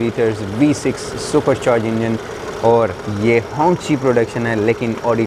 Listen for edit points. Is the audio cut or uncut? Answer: uncut